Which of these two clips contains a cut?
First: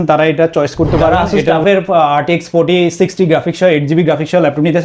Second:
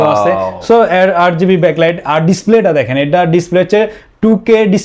first; 1 cut; at 1.3 s

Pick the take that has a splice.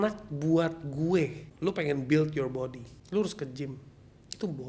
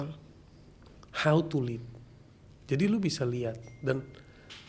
first; 2 cuts; at 1.5 s, 2.9 s

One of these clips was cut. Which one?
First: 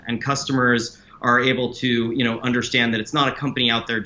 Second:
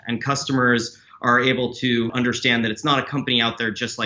second; 1 cut; at 2.1 s

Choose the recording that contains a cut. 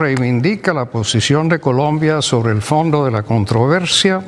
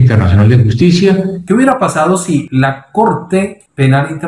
second; 2 cuts; at 1.4 s, 2.5 s

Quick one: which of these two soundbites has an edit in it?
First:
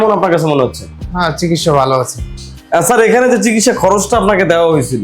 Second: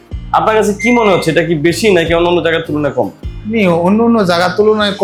first; 1 cut; at 2.3 s

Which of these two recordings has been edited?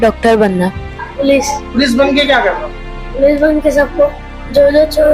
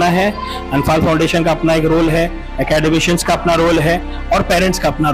first; 1 cut; at 1.0 s

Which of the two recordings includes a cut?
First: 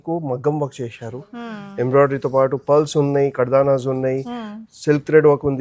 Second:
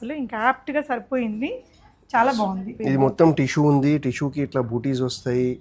second; 1 cut; at 2.7 s

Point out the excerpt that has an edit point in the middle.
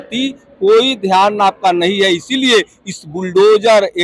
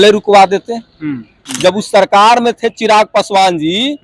second; 1 cut; at 1.4 s

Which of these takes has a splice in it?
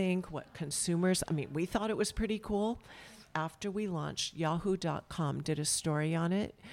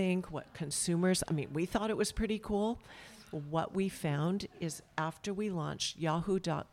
first; 1 cut; at 3.2 s

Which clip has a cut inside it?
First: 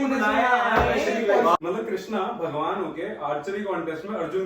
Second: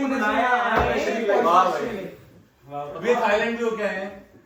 first; 1 cut; at 1.6 s

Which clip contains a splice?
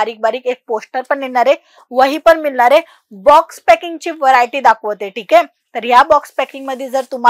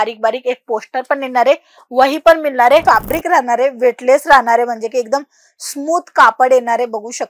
second; 1 cut; at 2.8 s

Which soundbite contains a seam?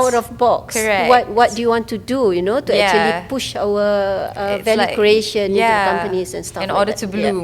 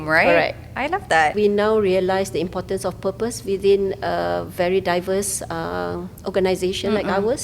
second; 1 cut; at 1.3 s

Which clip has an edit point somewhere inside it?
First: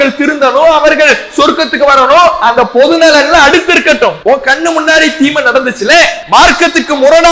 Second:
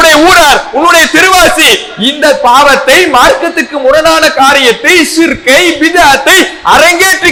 first; 2 cuts; at 4.2 s, 6.2 s

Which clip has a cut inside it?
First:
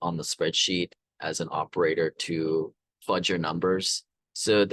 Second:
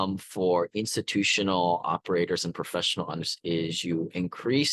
second; 1 cut; at 3.3 s

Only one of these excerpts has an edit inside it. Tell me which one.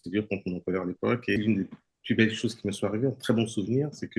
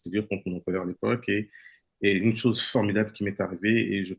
first; 1 cut; at 1.4 s

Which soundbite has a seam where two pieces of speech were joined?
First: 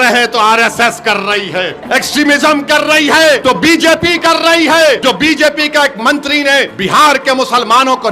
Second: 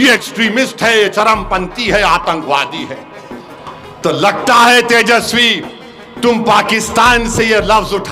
first; 4 cuts; at 1.8 s, 3.4 s, 5.0 s, 6.8 s

